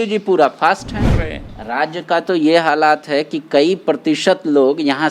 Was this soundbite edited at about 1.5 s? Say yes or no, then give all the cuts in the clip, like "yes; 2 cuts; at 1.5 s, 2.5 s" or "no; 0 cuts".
yes; 1 cut; at 1.5 s